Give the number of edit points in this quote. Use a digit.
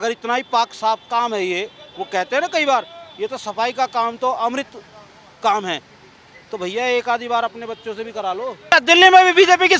1